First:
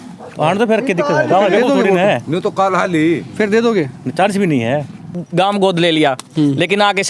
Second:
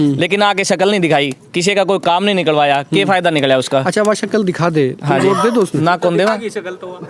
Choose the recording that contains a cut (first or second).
first